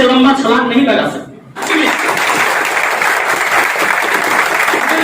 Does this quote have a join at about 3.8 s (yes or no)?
no